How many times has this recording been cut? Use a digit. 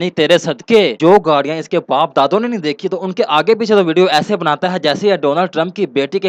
1